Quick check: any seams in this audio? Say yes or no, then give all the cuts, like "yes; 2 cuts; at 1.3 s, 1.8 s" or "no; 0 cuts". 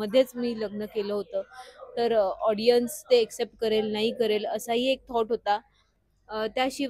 no; 0 cuts